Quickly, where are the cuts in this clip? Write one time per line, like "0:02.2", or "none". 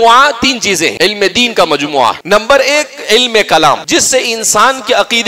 0:00.9
0:02.2
0:03.8